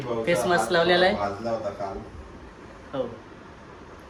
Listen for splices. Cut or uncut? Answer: uncut